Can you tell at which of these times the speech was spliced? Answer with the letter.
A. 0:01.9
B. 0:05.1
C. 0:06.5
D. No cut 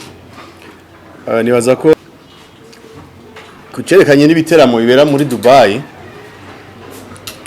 A